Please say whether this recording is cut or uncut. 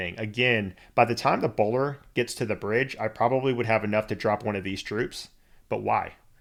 uncut